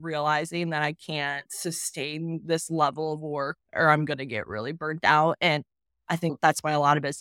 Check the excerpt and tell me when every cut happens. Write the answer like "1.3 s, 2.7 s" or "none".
1.5 s, 6.3 s